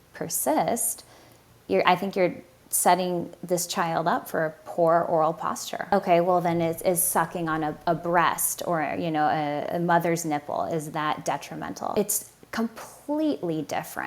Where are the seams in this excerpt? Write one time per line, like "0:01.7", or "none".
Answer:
0:05.9
0:11.9